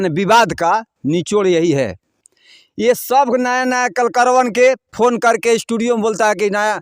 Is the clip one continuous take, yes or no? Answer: yes